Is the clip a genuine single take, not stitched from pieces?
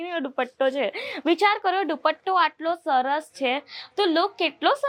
yes; 0 cuts

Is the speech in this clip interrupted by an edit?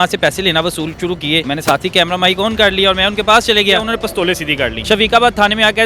yes; 2 cuts; at 1.4 s, 4.3 s

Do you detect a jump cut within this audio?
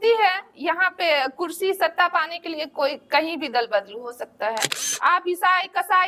yes; 1 cut; at 4.9 s

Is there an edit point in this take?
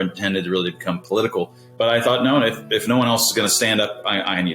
yes; 1 cut; at 1.6 s

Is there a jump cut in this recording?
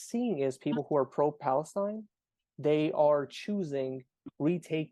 no; 0 cuts

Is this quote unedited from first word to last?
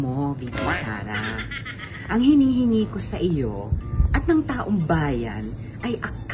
yes; 0 cuts

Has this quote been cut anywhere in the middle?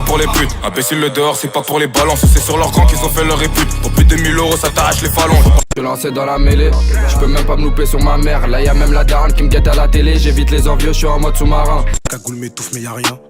yes; 2 cuts; at 5.6 s, 12.0 s

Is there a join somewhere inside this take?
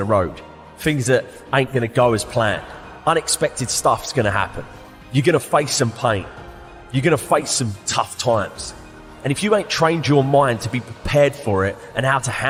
no; 0 cuts

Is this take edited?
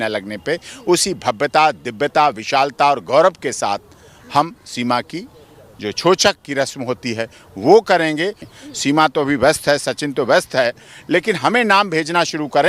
yes; 1 cut; at 8.4 s

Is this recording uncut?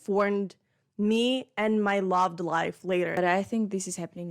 no; 1 cut; at 3.2 s

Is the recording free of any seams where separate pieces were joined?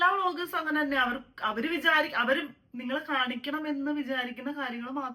yes; 0 cuts

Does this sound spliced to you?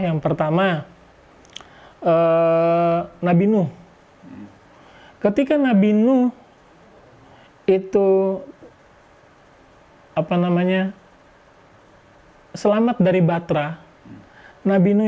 no; 0 cuts

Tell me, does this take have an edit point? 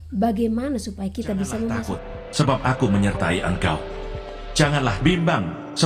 yes; 1 cut; at 1.9 s

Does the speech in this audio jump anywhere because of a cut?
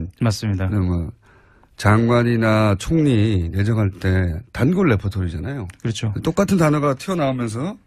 no; 0 cuts

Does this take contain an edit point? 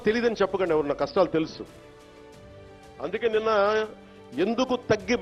no; 0 cuts

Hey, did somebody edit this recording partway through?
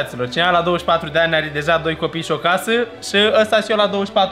no; 0 cuts

